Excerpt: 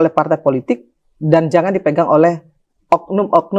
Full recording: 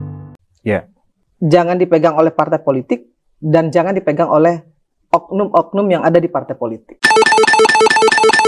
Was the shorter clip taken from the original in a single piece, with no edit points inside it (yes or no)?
yes